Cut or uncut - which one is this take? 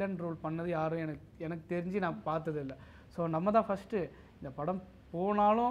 uncut